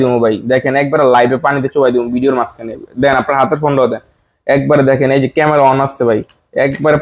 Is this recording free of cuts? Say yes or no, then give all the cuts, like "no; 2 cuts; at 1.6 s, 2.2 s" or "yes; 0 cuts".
yes; 0 cuts